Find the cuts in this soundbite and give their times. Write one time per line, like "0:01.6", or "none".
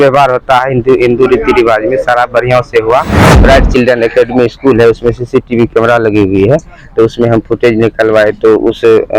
0:03.2